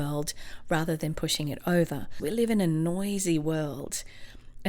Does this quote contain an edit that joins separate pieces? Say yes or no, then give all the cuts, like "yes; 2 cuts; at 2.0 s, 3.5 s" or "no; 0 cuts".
yes; 1 cut; at 2.2 s